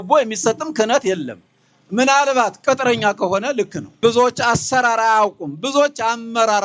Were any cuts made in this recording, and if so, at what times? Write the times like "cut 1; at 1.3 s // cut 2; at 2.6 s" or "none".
cut 1; at 3.8 s